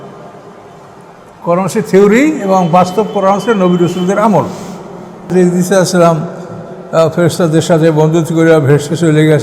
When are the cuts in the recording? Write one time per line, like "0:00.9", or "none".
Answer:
0:05.3